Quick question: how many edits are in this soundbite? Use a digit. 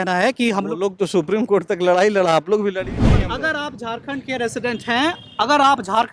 1